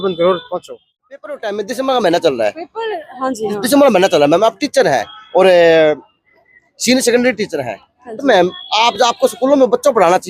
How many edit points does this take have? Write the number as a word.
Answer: one